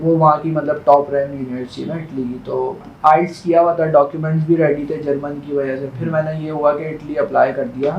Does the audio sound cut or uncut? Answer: cut